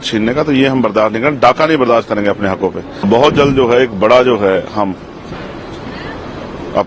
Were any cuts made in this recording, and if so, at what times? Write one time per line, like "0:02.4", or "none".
0:03.1